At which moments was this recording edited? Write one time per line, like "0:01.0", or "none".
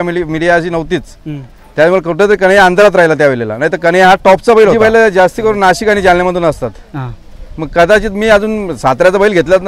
0:04.8